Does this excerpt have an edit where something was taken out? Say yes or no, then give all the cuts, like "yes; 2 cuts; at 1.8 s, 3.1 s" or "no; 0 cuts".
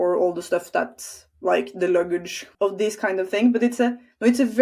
yes; 1 cut; at 2.5 s